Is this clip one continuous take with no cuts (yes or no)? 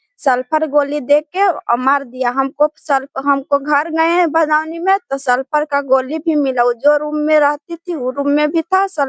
yes